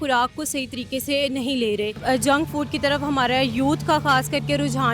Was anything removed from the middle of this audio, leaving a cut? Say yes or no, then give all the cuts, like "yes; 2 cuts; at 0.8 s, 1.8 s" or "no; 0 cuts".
yes; 1 cut; at 2.0 s